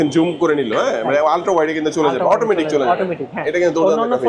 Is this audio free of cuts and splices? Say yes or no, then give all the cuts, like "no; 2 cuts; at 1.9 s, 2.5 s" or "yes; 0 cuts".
yes; 0 cuts